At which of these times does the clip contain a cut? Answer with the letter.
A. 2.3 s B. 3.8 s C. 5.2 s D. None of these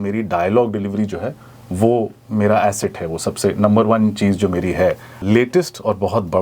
C